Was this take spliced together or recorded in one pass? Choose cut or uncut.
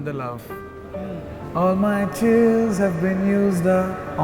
uncut